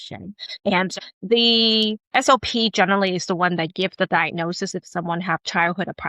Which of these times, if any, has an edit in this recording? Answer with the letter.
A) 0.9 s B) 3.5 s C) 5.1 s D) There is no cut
A